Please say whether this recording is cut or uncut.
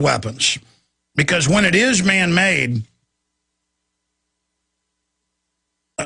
uncut